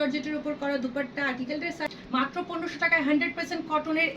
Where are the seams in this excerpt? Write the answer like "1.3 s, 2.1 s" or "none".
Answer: 1.9 s